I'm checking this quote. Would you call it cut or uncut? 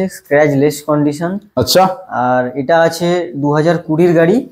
uncut